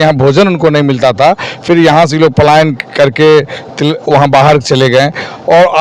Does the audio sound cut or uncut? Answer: uncut